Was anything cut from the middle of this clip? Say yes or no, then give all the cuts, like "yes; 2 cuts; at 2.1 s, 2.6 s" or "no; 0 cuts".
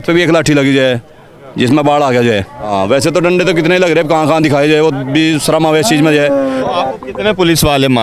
yes; 2 cuts; at 2.6 s, 6.6 s